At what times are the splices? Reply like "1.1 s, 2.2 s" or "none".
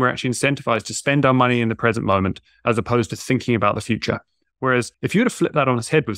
4.9 s